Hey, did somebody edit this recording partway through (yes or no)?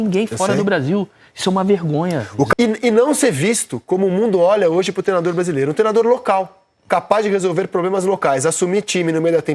yes